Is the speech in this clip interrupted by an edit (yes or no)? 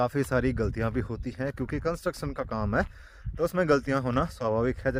no